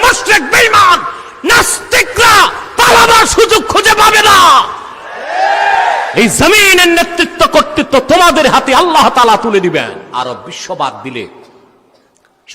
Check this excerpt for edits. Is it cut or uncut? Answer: cut